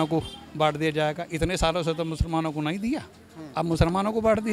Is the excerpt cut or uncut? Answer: uncut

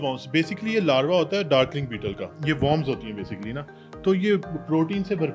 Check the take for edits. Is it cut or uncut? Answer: cut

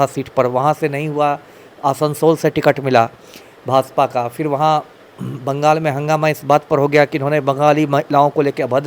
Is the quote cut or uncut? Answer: uncut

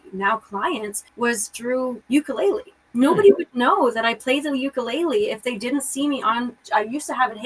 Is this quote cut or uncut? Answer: cut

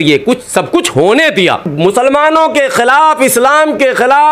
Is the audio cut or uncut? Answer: cut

